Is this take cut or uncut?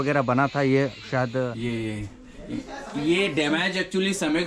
cut